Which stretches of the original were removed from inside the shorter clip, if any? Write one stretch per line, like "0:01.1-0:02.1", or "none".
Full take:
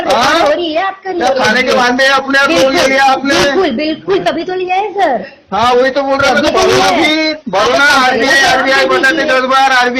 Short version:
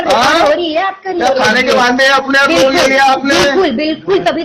none